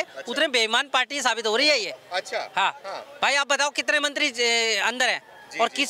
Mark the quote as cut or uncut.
uncut